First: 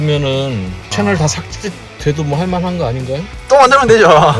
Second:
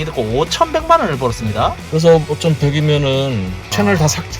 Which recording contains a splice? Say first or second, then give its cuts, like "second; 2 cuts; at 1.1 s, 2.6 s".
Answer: second; 1 cut; at 1.8 s